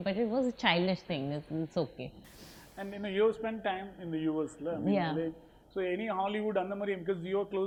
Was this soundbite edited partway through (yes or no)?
no